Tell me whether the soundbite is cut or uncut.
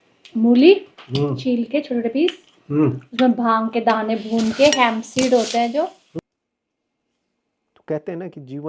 cut